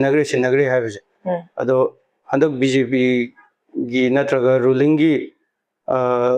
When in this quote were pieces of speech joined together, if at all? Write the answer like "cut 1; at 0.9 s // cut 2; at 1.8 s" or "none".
none